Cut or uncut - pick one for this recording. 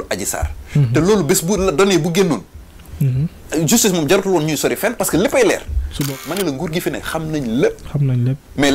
cut